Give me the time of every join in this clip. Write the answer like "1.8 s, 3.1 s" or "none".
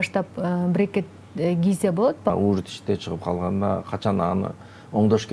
2.3 s